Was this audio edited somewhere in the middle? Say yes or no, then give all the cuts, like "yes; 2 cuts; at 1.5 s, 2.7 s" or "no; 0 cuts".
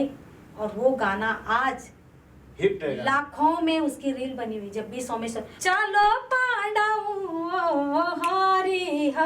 yes; 1 cut; at 5.5 s